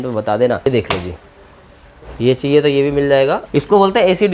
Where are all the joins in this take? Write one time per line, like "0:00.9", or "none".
0:00.7
0:03.4